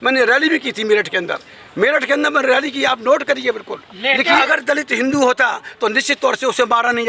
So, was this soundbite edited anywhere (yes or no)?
yes